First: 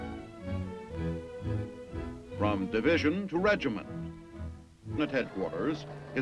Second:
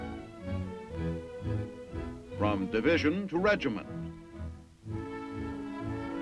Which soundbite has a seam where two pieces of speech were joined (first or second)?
second